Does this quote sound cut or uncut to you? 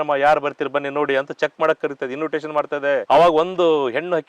cut